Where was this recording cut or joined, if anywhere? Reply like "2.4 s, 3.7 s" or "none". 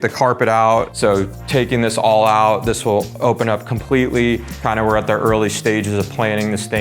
0.9 s, 4.6 s

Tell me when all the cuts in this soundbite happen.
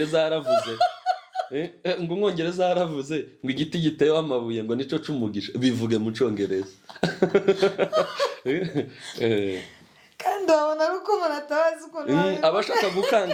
none

